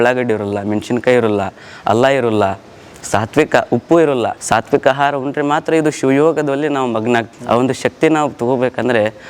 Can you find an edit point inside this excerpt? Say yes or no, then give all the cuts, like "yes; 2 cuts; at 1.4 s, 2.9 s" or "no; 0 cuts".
yes; 2 cuts; at 4.4 s, 7.3 s